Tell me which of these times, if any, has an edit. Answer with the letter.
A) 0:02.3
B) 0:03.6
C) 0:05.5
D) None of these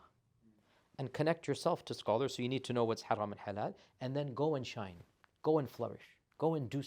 D